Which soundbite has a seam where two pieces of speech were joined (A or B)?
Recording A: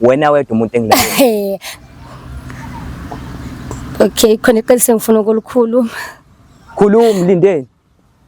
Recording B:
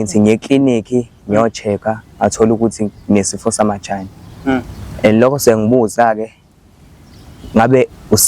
A